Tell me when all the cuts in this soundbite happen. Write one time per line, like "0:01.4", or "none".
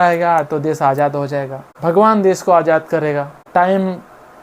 0:01.6
0:03.4